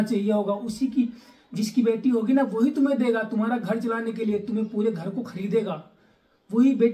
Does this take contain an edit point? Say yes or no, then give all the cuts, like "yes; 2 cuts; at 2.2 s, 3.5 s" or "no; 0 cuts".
no; 0 cuts